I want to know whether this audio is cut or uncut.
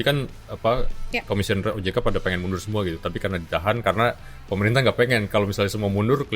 uncut